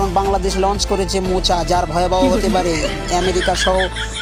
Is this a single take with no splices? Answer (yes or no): yes